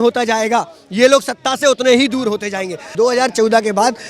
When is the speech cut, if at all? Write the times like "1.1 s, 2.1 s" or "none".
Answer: 2.8 s